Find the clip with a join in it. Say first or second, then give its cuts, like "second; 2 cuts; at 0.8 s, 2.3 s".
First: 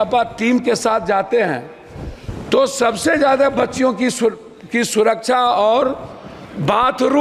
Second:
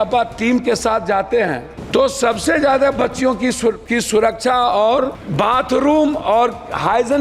second; 3 cuts; at 1.7 s, 3.8 s, 5.2 s